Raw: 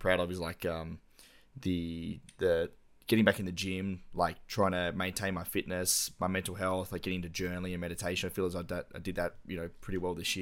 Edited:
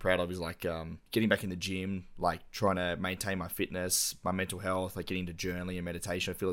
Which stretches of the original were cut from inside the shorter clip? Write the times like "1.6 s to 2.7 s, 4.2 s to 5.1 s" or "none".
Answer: 0.9 s to 2.9 s